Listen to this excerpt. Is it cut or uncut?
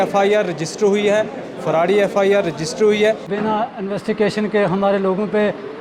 cut